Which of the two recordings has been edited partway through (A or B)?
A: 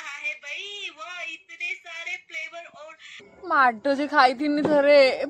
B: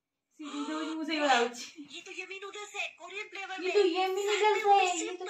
A